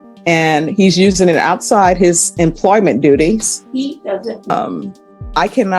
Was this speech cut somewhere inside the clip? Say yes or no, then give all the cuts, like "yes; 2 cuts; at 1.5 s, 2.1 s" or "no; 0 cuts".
yes; 1 cut; at 4.5 s